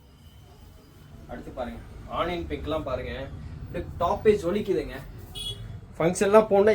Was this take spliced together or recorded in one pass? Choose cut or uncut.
uncut